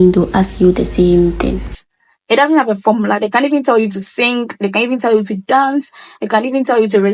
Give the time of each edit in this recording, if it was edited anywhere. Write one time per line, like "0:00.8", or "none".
0:01.6